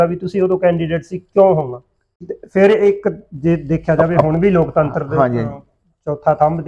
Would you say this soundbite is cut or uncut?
cut